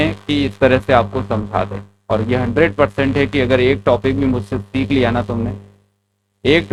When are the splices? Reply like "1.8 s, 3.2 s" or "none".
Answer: none